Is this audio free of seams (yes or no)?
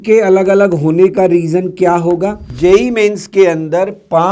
no